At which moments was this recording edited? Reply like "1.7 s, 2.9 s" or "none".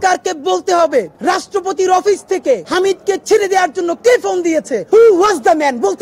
1.1 s, 2.7 s, 4.8 s